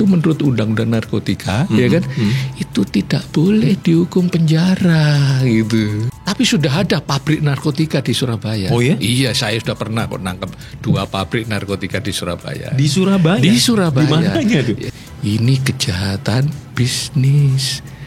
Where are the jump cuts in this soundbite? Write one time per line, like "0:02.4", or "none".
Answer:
0:06.0
0:14.9